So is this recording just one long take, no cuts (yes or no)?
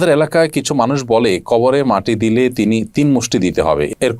yes